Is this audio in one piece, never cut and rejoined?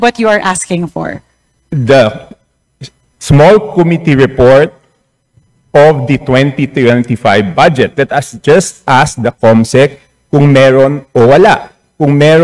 yes; 0 cuts

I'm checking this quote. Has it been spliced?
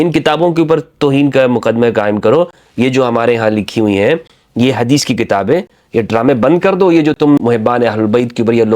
yes; 1 cut; at 7.4 s

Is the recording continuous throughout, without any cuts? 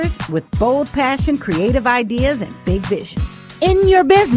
no; 1 cut; at 3.4 s

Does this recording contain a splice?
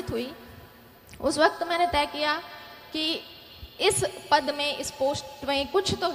no; 0 cuts

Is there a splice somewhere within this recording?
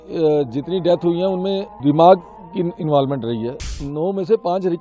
yes; 2 cuts; at 1.7 s, 3.8 s

